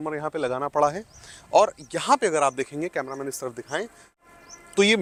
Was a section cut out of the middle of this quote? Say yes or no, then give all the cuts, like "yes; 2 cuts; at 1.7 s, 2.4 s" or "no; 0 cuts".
no; 0 cuts